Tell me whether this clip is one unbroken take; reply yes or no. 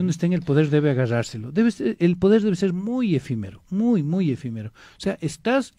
yes